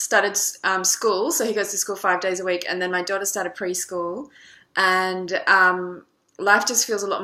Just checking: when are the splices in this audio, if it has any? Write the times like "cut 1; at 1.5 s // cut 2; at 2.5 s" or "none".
none